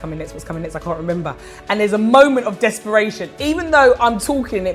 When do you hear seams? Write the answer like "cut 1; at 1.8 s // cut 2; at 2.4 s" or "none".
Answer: none

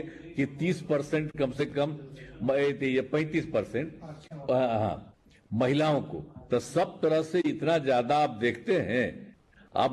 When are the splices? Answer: none

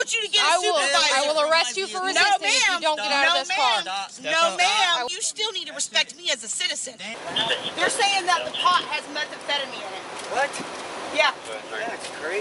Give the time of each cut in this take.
cut 1; at 5.1 s // cut 2; at 7.0 s

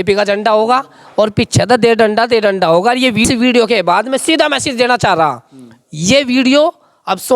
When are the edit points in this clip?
cut 1; at 3.2 s

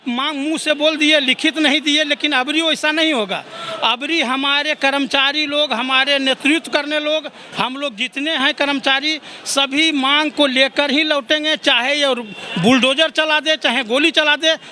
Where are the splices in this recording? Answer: none

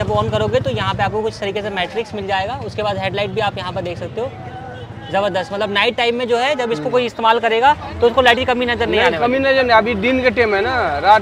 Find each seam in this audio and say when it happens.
none

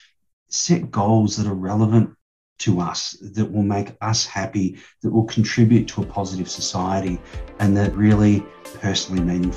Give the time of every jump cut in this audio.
cut 1; at 7.9 s // cut 2; at 8.7 s

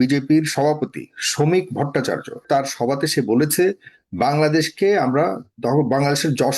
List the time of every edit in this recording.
cut 1; at 2.4 s

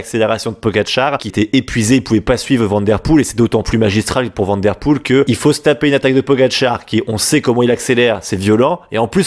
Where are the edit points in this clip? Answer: cut 1; at 1.3 s // cut 2; at 5.3 s

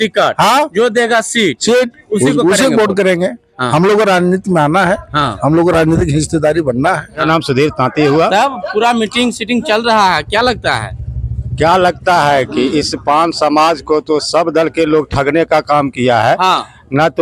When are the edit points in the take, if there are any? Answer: cut 1; at 7.2 s

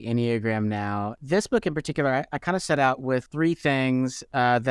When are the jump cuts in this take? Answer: cut 1; at 1.1 s // cut 2; at 3.3 s

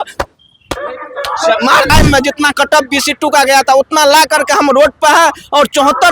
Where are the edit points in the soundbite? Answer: cut 1; at 1.9 s

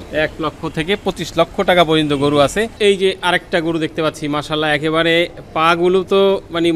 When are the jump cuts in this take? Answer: cut 1; at 2.7 s

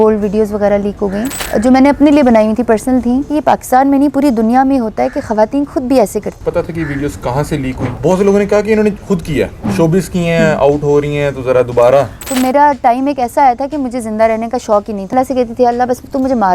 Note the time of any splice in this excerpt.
cut 1; at 1.3 s // cut 2; at 3.3 s // cut 3; at 6.4 s // cut 4; at 7.9 s // cut 5; at 12.2 s // cut 6; at 15.1 s

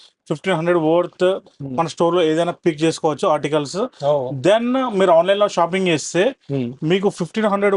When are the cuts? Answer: none

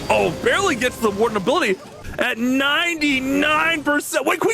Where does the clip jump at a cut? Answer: cut 1; at 2.0 s

